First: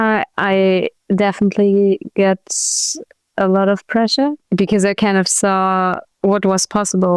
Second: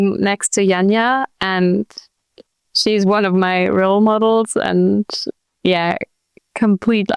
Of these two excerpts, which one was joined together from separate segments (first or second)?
first